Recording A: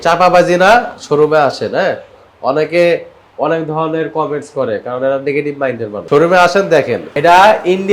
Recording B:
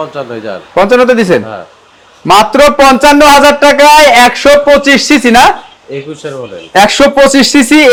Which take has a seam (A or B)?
A